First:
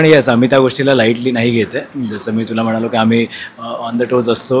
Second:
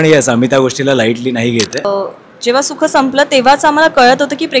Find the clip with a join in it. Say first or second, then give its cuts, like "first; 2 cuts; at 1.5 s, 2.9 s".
second; 1 cut; at 1.8 s